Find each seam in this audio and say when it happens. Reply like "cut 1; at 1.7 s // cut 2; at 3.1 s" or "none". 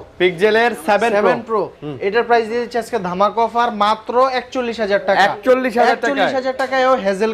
none